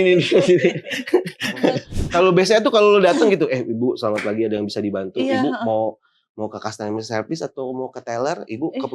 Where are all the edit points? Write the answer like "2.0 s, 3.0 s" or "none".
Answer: 1.9 s